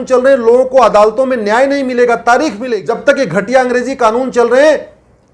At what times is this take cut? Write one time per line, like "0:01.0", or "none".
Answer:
0:02.7